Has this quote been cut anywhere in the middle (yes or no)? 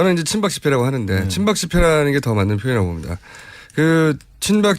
yes